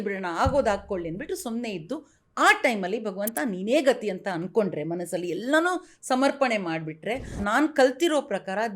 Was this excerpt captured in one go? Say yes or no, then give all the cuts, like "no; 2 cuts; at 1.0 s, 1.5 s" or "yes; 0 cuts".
no; 1 cut; at 7.4 s